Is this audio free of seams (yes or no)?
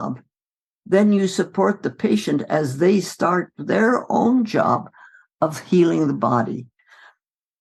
yes